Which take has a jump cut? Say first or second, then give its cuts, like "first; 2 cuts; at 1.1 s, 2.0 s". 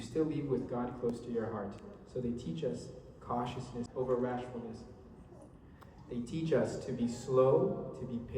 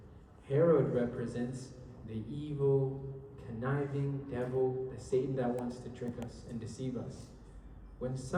first; 1 cut; at 3.9 s